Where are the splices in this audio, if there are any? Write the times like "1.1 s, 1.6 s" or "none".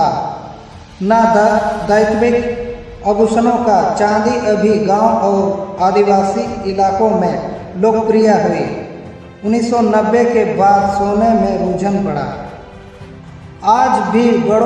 none